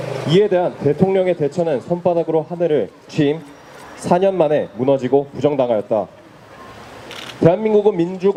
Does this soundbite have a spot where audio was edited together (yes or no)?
no